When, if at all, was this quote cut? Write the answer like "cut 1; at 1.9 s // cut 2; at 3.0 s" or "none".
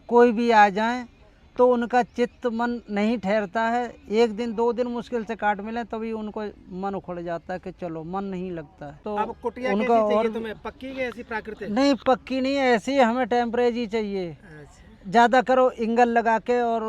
cut 1; at 9.0 s